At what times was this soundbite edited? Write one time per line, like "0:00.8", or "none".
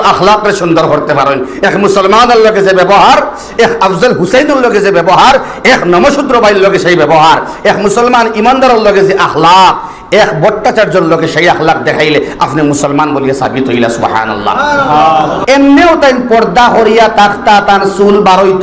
0:15.4